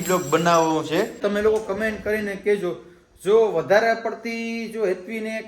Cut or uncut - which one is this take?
cut